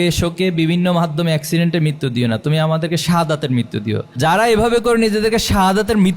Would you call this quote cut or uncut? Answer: cut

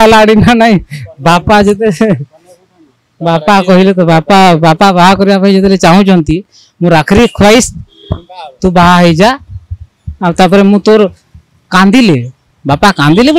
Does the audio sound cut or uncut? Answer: uncut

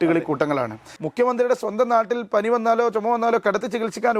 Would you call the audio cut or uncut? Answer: cut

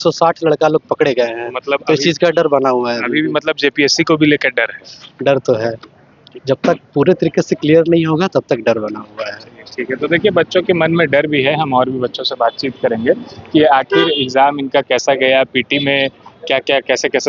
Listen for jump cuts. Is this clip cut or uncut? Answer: uncut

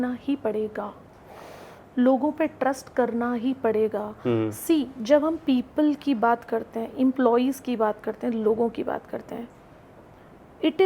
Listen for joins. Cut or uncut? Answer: uncut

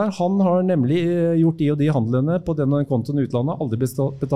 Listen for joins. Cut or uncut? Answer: uncut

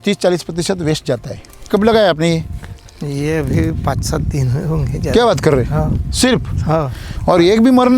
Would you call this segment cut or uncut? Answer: cut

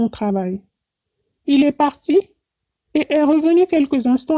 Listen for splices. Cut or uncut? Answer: uncut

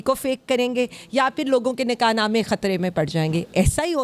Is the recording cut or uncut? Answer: uncut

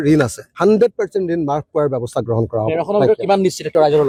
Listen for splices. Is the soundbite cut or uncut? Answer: uncut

